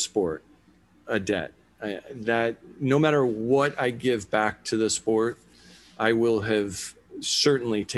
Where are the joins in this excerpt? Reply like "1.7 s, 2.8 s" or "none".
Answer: none